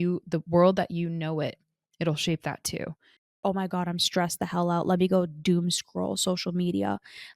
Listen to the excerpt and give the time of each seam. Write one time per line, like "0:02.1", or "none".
0:03.3